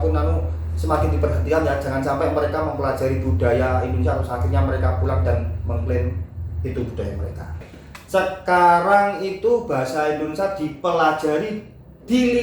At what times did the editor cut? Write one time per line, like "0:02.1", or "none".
0:07.8

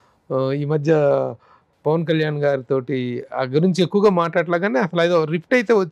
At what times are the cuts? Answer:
none

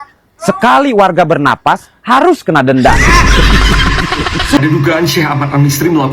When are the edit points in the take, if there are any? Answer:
0:04.6

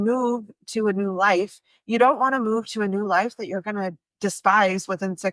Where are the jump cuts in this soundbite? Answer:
none

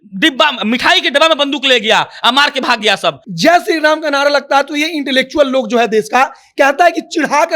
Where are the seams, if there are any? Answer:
0:03.2

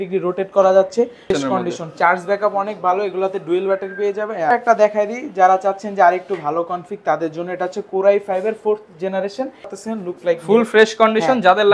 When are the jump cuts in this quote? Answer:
0:01.3
0:04.5
0:09.7

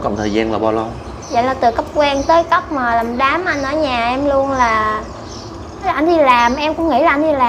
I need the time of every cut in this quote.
0:05.9

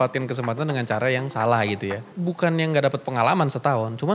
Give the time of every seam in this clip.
0:02.1

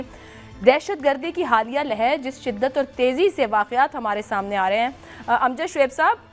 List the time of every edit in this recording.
none

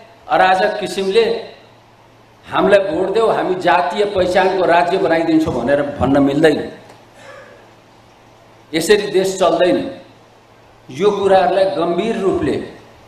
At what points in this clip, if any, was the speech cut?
none

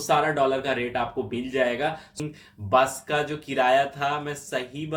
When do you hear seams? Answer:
0:02.1

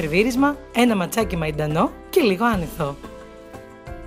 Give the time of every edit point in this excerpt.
0:03.0

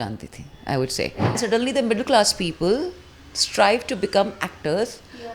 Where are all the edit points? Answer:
0:01.4

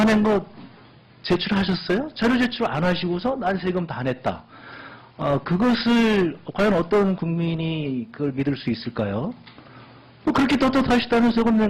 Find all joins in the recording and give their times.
none

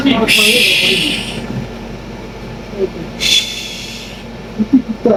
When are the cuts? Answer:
none

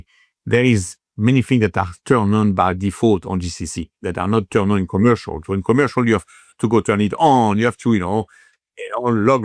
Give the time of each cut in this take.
none

